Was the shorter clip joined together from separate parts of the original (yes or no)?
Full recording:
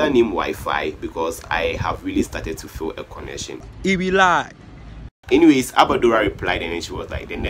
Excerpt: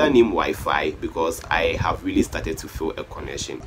no